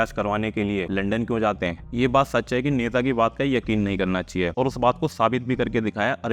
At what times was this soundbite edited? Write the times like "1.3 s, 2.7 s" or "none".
0.9 s, 1.8 s, 4.5 s